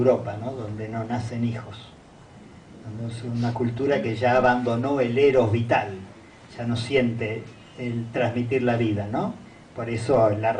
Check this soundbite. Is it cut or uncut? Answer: cut